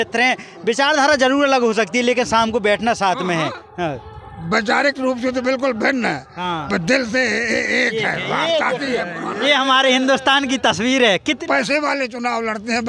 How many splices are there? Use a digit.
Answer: 1